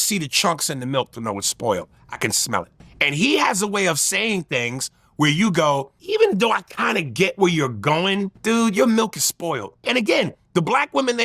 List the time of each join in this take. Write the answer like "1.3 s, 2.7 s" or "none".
2.8 s, 5.9 s, 8.3 s, 9.8 s